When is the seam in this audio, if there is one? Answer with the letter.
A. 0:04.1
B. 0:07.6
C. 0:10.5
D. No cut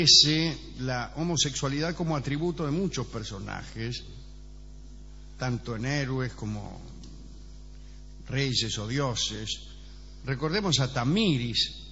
A